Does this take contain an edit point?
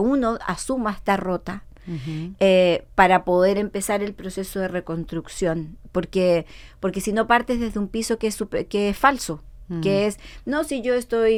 no; 0 cuts

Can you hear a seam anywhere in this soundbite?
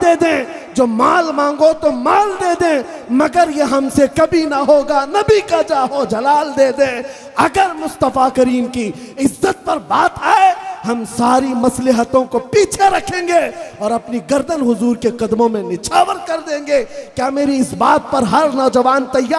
no; 0 cuts

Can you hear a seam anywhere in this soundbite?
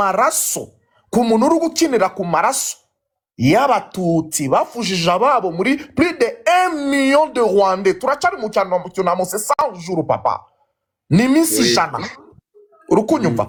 no; 0 cuts

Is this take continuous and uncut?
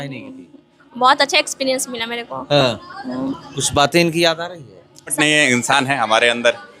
no; 1 cut; at 5.1 s

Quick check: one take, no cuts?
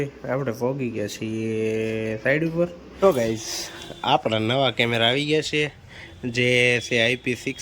no; 1 cut; at 2.8 s

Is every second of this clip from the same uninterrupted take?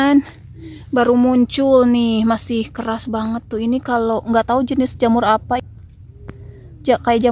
no; 1 cut; at 5.6 s

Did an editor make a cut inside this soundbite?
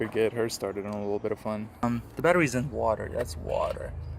yes; 1 cut; at 1.8 s

